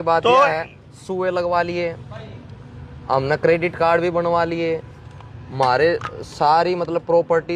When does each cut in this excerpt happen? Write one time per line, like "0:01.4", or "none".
none